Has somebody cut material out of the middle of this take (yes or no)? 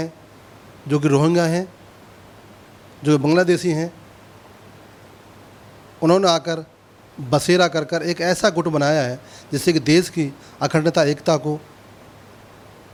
no